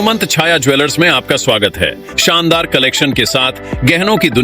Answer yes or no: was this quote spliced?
yes